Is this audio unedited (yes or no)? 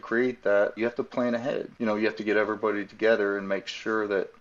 no